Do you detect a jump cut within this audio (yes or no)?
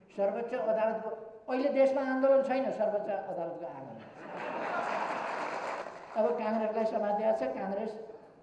yes